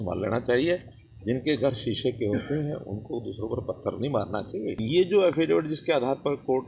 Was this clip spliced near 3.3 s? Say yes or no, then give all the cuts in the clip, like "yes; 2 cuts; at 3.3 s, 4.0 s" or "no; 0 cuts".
no; 1 cut; at 4.8 s